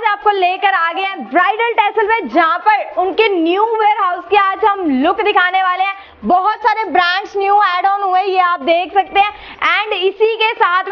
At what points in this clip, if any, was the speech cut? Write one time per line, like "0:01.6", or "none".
none